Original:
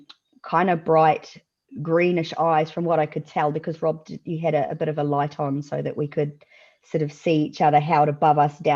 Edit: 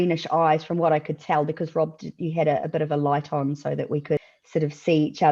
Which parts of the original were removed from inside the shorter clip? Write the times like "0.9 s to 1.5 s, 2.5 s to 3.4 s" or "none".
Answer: 6.4 s to 6.7 s